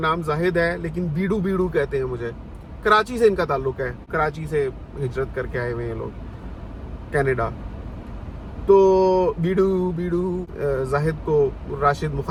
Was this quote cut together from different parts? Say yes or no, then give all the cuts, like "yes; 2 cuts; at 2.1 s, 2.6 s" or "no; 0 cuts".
no; 0 cuts